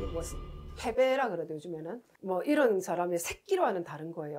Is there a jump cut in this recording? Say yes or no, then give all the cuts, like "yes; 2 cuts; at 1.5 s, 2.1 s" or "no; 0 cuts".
no; 0 cuts